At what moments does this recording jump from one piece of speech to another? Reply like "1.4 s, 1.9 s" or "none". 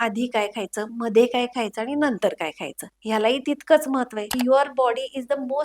4.3 s